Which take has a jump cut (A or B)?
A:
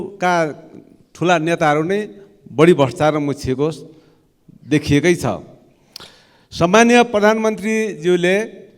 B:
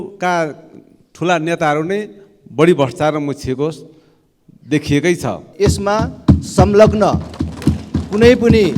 B